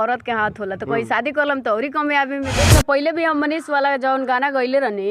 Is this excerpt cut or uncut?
cut